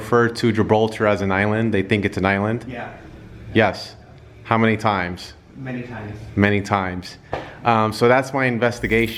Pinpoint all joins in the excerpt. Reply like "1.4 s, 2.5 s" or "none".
none